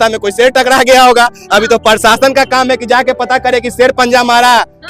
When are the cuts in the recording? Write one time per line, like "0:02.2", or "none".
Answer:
none